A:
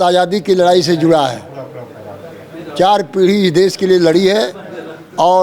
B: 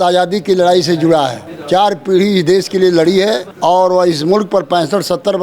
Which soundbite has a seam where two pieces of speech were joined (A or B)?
B